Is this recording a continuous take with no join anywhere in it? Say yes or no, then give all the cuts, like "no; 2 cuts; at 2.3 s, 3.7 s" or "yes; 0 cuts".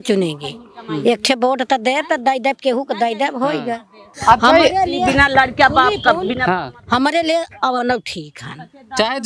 no; 1 cut; at 4.1 s